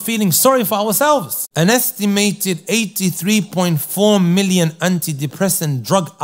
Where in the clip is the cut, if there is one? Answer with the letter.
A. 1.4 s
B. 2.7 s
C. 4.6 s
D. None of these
A